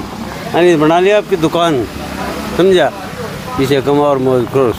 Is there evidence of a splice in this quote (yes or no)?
no